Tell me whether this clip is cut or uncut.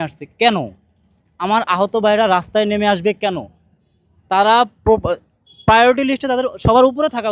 uncut